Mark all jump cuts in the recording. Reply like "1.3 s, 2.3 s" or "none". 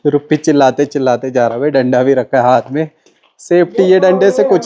none